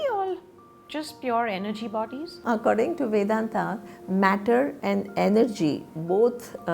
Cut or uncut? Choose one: cut